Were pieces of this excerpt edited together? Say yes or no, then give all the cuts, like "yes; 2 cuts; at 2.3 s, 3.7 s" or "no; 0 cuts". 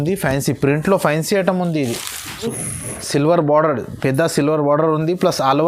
yes; 1 cut; at 2.4 s